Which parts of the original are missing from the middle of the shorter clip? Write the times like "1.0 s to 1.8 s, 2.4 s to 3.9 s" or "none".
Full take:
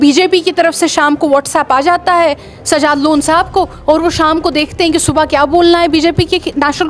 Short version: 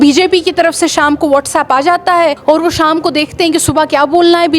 2.4 s to 3.8 s